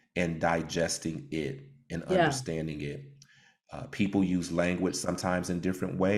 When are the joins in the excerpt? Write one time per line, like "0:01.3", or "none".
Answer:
none